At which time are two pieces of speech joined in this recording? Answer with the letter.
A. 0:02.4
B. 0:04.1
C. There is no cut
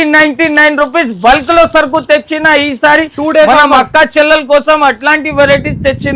C